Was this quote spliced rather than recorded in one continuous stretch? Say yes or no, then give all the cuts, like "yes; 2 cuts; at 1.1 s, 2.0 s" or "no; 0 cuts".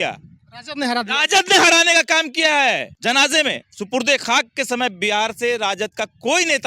yes; 1 cut; at 2.9 s